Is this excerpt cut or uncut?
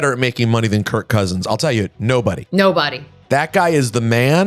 uncut